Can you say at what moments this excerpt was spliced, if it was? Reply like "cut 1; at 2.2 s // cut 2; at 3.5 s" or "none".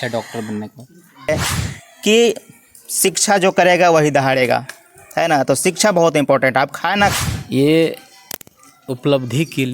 cut 1; at 1.3 s // cut 2; at 7.1 s